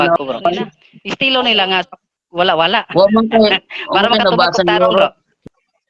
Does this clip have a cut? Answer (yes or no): no